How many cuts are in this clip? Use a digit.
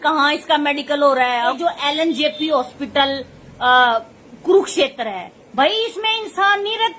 1